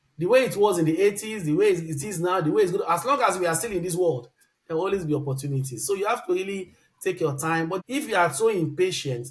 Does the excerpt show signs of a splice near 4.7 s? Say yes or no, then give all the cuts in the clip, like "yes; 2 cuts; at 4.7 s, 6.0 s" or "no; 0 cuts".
no; 1 cut; at 7.8 s